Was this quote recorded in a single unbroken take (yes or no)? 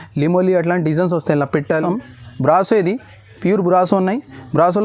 no